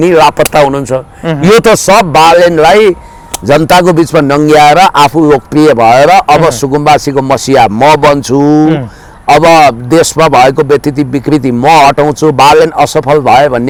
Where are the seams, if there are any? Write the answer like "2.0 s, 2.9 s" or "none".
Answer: none